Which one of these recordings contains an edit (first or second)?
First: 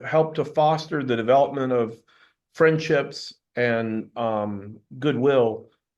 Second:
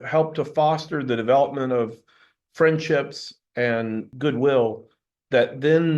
second